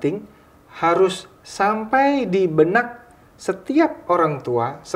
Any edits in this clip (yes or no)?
no